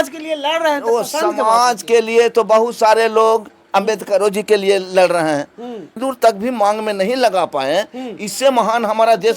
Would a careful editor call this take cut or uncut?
cut